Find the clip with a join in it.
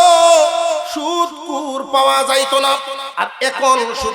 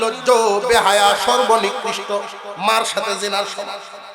first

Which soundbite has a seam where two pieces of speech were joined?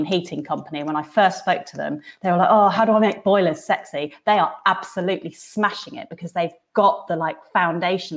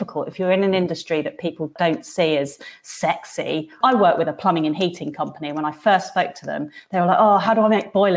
second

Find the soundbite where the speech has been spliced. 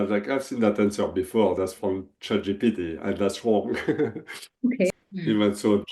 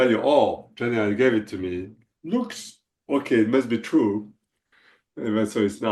first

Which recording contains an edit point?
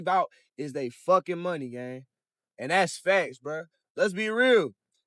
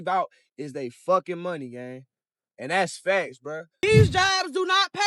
second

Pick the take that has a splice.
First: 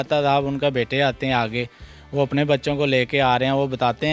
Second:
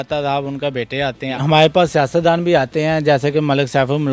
second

